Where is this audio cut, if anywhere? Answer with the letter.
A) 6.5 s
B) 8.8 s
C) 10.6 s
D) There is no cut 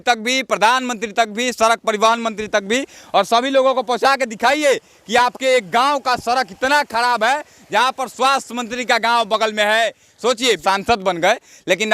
C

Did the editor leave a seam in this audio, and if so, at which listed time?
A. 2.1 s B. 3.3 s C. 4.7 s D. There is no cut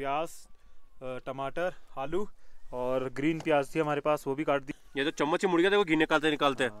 C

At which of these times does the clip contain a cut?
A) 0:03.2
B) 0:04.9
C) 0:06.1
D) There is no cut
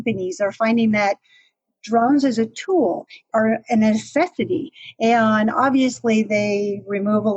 D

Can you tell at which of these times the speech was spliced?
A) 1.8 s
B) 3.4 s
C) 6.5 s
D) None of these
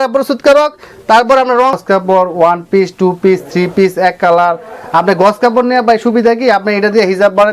A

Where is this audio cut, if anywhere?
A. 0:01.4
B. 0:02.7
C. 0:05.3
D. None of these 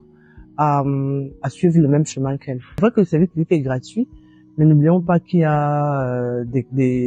B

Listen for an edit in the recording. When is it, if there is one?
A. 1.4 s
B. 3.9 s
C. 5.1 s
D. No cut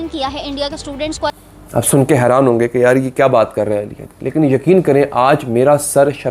A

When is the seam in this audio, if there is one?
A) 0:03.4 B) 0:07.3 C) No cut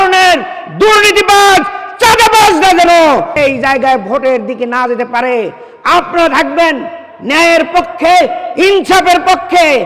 A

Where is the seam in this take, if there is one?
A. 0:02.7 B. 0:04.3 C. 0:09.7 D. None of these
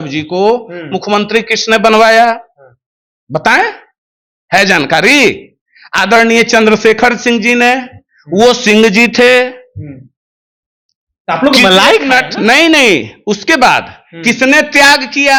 D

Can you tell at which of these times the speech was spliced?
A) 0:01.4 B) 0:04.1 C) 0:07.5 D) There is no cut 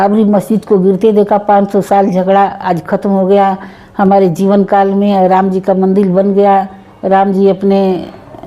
D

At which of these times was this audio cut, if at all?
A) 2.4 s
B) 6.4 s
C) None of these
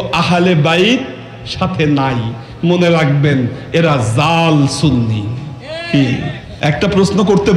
B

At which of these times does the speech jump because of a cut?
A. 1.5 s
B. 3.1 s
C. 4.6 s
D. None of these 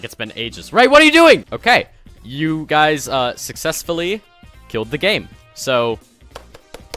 A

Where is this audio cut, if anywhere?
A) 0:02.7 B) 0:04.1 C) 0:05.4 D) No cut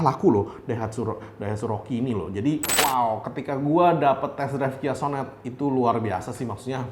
A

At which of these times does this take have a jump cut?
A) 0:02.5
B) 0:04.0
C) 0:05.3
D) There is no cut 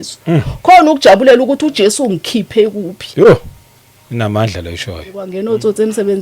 C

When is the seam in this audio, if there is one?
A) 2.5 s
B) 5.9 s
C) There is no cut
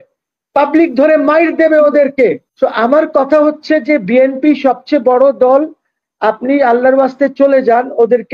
A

